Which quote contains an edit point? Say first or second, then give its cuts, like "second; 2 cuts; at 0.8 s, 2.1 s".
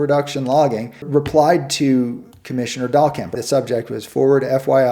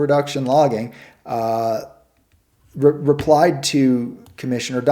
first; 2 cuts; at 1.1 s, 3.4 s